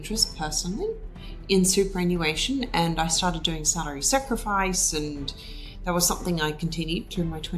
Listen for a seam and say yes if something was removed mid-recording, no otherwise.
no